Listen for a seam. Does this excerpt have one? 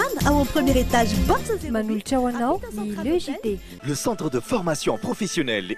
yes; 1 cut; at 3.7 s

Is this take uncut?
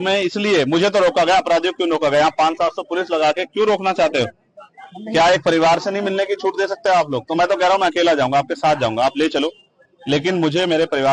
yes; 0 cuts

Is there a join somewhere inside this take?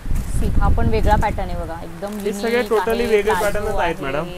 no; 0 cuts

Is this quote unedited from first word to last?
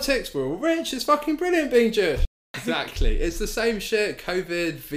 no; 1 cut; at 2.4 s

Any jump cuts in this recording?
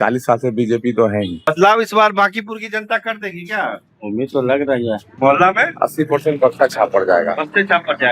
yes; 2 cuts; at 1.5 s, 5.1 s

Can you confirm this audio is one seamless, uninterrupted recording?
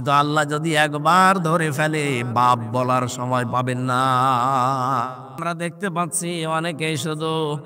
no; 1 cut; at 5.3 s

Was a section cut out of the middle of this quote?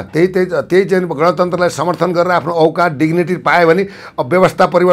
no; 0 cuts

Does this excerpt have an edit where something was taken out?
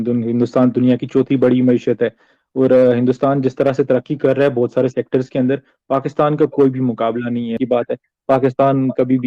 yes; 1 cut; at 7.6 s

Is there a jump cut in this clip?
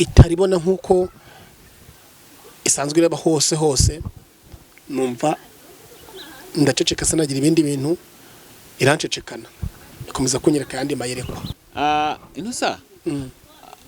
yes; 1 cut; at 11.6 s

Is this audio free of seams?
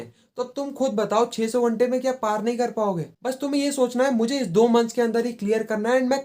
no; 1 cut; at 3.1 s

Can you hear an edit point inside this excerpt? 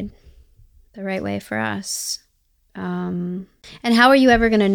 yes; 1 cut; at 3.6 s

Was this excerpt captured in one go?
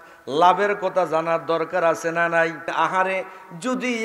no; 1 cut; at 2.6 s

